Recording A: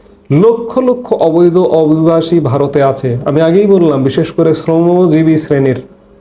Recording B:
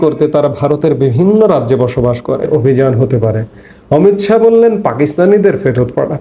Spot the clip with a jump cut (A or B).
B